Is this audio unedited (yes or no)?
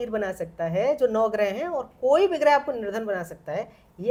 yes